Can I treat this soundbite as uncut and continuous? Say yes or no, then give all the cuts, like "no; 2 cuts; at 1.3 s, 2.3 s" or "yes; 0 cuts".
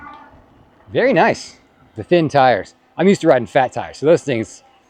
no; 1 cut; at 2.0 s